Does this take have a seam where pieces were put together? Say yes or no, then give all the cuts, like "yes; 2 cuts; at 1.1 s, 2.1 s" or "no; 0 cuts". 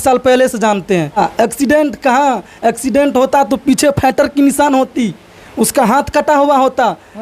yes; 1 cut; at 1.2 s